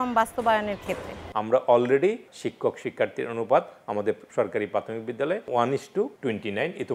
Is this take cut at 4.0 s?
no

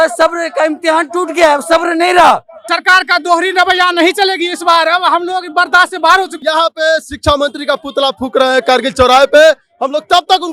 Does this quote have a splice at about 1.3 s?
no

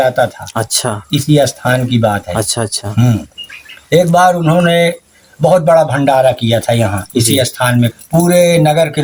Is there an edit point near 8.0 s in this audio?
yes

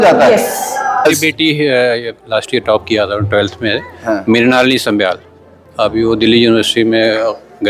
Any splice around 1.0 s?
yes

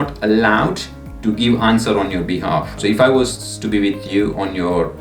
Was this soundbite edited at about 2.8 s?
yes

